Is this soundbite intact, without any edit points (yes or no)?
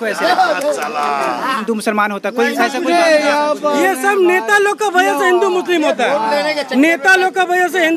no